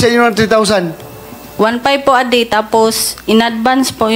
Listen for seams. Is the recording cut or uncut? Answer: cut